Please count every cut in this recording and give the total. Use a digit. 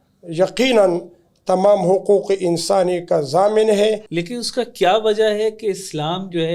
1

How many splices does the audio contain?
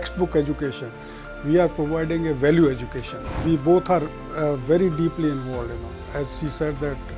1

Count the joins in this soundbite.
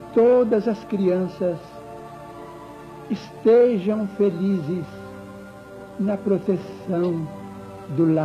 1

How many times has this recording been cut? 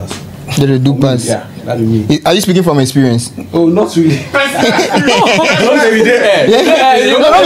0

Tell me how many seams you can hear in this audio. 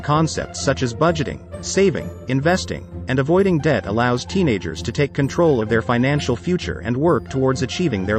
0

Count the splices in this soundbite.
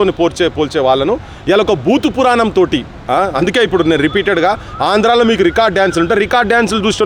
0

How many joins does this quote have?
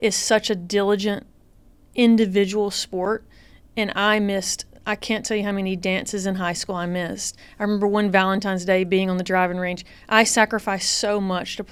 0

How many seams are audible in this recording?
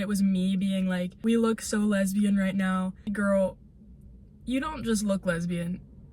2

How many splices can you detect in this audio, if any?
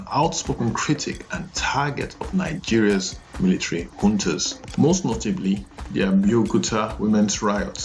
1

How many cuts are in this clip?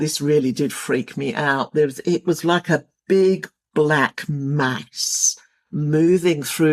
0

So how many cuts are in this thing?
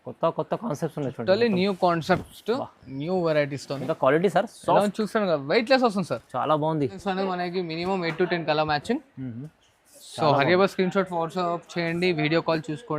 1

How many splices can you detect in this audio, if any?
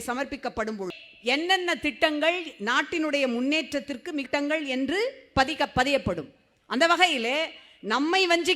2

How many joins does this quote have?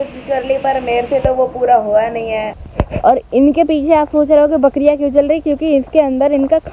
1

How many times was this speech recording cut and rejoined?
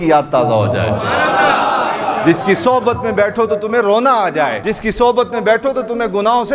1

